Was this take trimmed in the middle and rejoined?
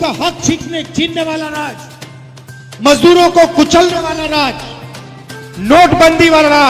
no; 0 cuts

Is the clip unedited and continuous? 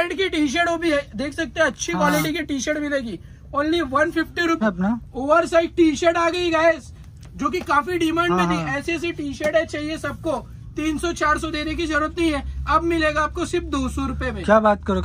no; 1 cut; at 4.6 s

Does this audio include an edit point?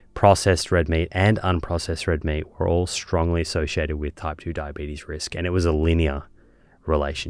no; 0 cuts

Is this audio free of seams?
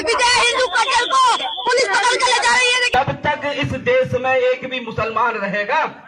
no; 1 cut; at 2.8 s

